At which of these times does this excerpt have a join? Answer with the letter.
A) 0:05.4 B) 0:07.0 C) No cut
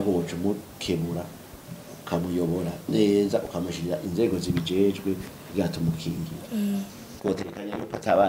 B